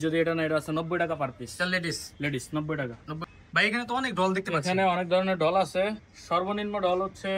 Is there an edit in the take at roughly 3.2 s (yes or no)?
yes